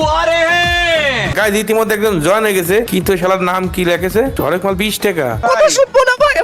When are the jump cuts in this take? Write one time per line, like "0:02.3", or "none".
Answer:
0:01.3
0:02.9
0:04.3
0:05.4